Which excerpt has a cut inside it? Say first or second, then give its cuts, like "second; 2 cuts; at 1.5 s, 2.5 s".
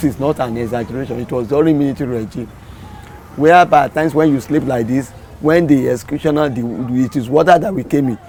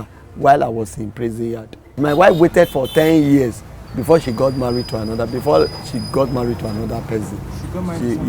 second; 1 cut; at 2.0 s